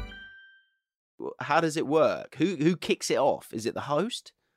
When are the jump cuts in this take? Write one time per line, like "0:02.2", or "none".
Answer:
0:01.1